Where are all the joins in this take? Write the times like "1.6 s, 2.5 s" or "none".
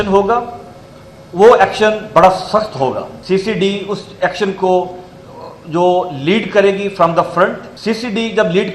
3.1 s, 7.7 s